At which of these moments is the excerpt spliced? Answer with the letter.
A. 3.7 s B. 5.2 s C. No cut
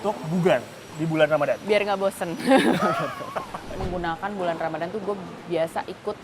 A